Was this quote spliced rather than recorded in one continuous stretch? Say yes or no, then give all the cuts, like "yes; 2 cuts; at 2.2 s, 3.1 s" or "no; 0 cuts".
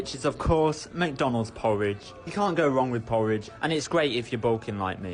yes; 1 cut; at 3.5 s